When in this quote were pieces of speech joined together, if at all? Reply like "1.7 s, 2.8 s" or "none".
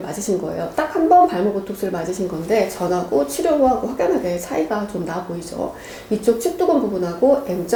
none